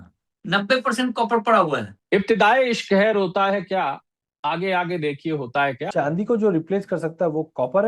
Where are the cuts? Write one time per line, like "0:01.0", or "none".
0:01.9
0:05.8